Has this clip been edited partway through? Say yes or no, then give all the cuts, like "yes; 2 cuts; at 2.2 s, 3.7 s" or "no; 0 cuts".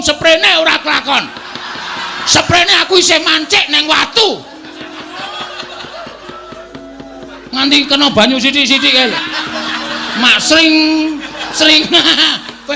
no; 0 cuts